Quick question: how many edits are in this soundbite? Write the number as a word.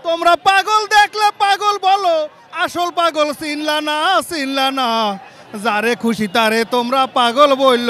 zero